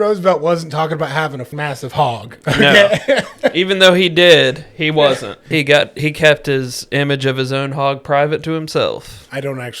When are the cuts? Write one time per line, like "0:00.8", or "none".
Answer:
0:01.5
0:05.4